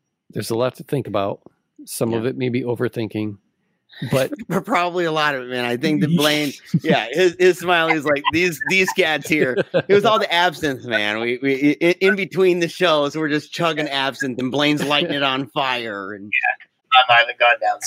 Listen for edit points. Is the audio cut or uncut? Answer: cut